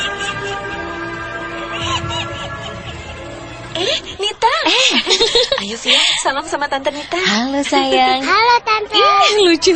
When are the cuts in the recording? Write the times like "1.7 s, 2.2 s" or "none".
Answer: 3.7 s